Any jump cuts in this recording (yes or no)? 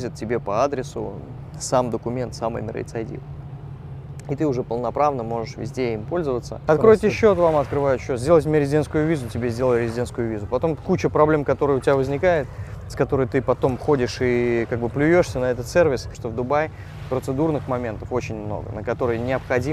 yes